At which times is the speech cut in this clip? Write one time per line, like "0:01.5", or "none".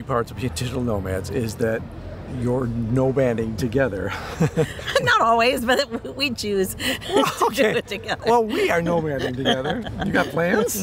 none